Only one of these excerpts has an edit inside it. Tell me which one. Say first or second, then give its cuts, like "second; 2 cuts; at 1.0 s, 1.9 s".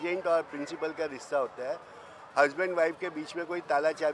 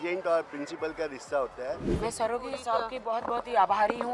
second; 1 cut; at 1.9 s